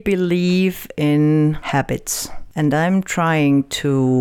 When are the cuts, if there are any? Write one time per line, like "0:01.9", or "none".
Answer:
0:01.6